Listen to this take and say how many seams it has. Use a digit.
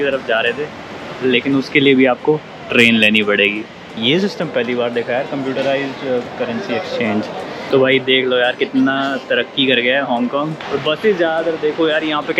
3